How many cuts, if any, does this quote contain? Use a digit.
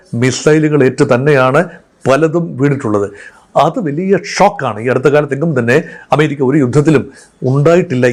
0